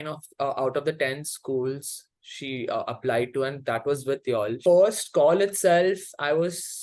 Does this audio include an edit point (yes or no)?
yes